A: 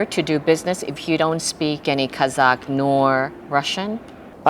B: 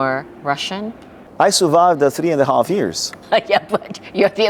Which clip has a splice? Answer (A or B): A